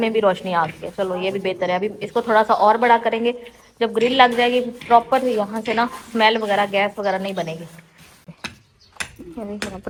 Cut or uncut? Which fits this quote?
uncut